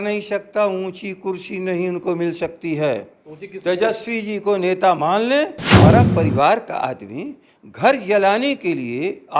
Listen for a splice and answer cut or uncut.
cut